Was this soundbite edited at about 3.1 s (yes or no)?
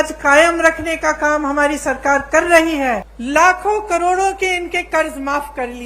yes